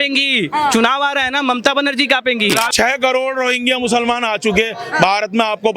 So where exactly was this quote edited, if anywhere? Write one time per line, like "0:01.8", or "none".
0:02.7